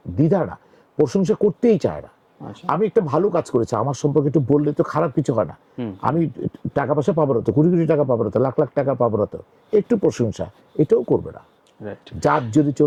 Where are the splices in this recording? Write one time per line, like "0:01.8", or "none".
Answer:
none